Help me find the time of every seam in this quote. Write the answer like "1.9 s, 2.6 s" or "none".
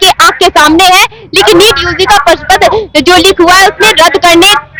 none